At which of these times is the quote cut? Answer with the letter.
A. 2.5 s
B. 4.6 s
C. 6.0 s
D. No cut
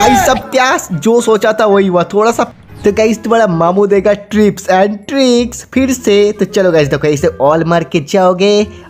A